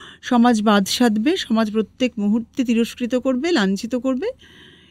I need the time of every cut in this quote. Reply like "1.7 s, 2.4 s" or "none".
none